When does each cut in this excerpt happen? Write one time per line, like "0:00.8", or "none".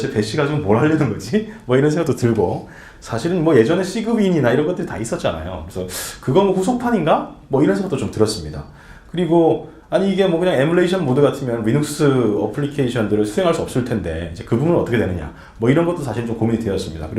0:15.3